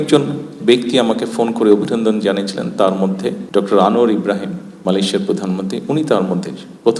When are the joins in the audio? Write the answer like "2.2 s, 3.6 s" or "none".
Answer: 3.4 s, 4.7 s